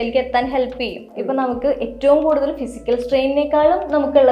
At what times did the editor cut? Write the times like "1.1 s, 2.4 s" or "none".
1.1 s